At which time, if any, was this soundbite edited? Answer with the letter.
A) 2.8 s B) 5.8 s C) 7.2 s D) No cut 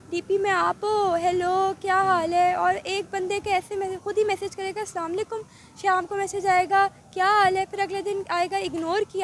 D